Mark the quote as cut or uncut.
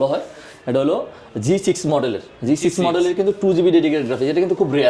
uncut